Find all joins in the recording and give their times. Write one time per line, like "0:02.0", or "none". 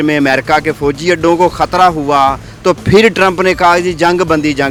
none